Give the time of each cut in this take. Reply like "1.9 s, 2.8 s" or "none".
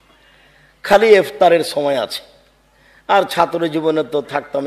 none